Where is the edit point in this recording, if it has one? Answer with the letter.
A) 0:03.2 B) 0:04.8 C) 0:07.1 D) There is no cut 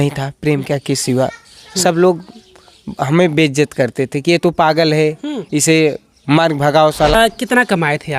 C